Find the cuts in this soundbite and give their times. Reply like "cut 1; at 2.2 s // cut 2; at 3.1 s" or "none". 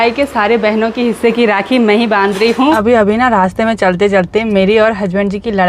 cut 1; at 2.8 s

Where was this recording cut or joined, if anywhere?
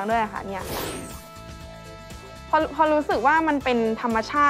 none

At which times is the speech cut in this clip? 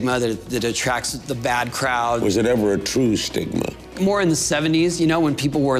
cut 1; at 2.2 s // cut 2; at 3.9 s

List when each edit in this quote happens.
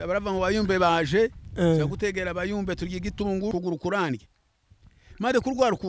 cut 1; at 3.5 s

